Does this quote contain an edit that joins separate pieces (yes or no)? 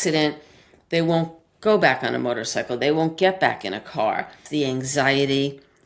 yes